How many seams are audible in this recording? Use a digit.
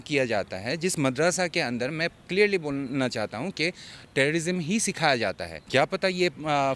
1